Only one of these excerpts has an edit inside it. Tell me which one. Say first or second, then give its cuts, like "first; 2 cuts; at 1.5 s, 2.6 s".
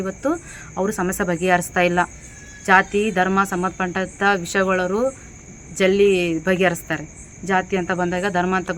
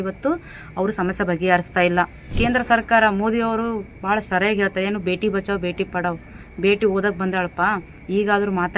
second; 1 cut; at 2.2 s